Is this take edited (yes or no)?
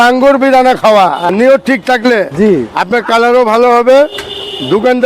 yes